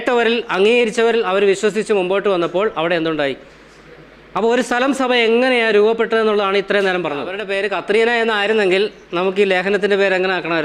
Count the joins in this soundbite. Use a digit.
1